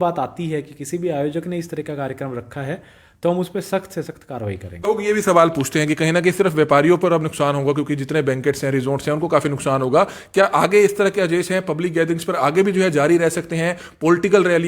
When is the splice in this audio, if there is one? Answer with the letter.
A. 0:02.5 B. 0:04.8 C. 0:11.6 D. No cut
B